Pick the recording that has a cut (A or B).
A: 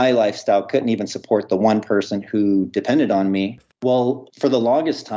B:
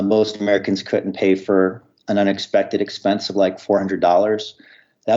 A